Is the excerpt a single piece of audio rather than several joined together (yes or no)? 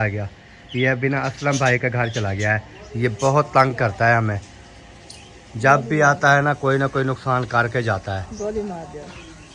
yes